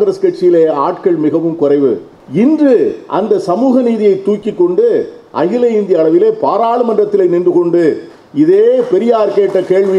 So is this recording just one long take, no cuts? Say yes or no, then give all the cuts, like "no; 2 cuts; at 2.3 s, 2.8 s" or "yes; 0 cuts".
no; 1 cut; at 2.1 s